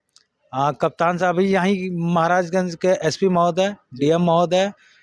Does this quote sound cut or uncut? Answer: uncut